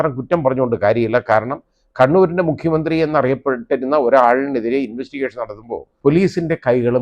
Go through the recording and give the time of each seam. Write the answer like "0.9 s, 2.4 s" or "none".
5.9 s